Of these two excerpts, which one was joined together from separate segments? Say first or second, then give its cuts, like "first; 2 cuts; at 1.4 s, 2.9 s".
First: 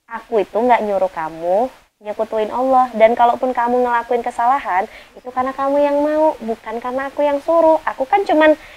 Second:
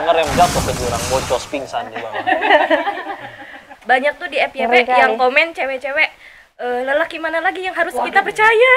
second; 1 cut; at 3.7 s